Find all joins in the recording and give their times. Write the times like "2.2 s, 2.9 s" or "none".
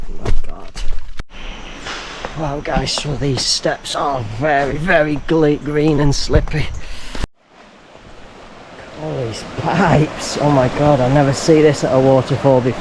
1.2 s, 7.4 s